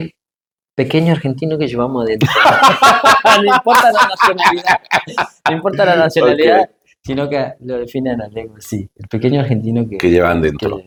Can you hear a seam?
no; 0 cuts

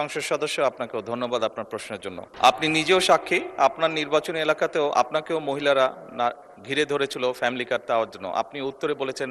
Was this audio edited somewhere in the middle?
yes; 1 cut; at 2.3 s

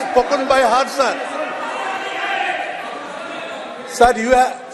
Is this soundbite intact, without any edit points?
yes; 0 cuts

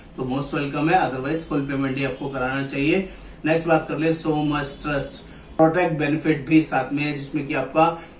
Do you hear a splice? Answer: yes; 1 cut; at 5.4 s

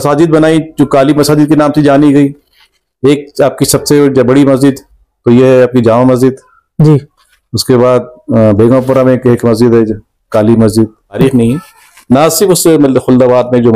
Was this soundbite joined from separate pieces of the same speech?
yes; 1 cut; at 11.2 s

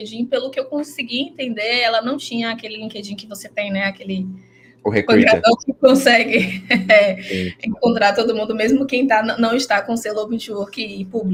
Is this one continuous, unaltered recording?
yes; 0 cuts

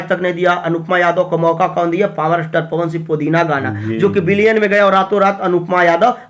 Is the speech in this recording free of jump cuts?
yes; 0 cuts

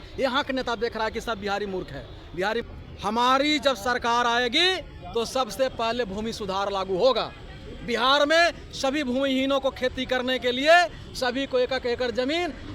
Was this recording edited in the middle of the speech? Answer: yes; 1 cut; at 2.6 s

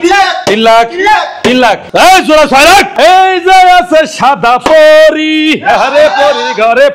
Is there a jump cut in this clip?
yes; 2 cuts; at 1.8 s, 2.9 s

